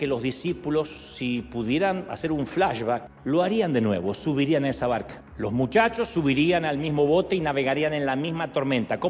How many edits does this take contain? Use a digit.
2